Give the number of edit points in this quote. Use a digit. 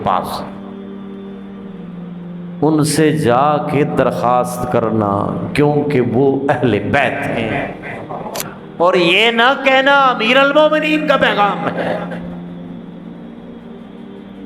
1